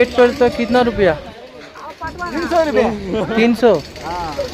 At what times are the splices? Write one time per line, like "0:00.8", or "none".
none